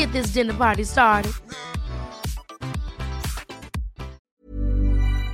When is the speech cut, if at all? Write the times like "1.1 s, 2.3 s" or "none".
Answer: 4.2 s